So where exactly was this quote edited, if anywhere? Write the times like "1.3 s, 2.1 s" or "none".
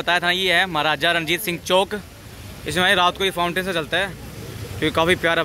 none